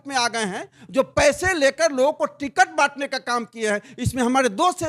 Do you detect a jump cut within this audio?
no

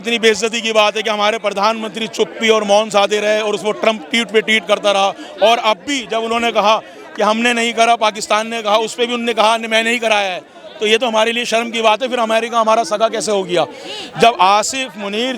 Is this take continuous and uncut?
yes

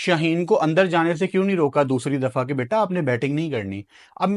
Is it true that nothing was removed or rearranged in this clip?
yes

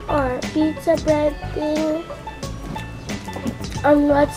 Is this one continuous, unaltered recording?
yes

